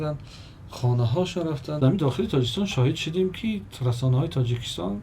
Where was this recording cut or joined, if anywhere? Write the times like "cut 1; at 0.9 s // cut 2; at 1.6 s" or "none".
cut 1; at 1.8 s